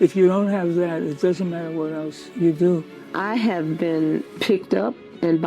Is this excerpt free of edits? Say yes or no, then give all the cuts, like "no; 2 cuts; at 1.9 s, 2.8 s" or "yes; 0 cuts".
no; 3 cuts; at 2.2 s, 3.0 s, 4.3 s